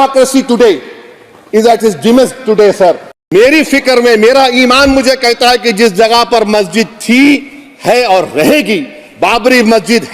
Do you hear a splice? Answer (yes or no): yes